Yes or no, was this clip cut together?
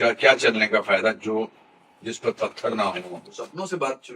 yes